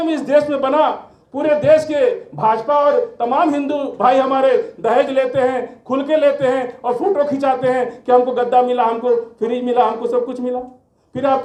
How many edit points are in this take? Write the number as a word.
zero